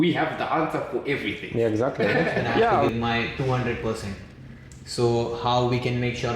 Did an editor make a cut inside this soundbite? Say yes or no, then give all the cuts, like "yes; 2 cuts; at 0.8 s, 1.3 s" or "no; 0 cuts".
yes; 1 cut; at 2.8 s